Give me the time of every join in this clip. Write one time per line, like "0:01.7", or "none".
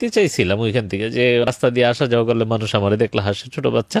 0:01.5